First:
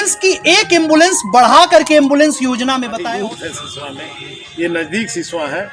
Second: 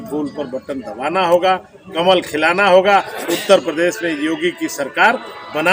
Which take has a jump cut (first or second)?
first